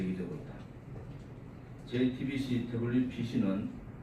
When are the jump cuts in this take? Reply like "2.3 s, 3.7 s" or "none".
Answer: 1.1 s